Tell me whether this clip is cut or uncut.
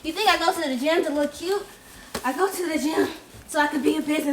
uncut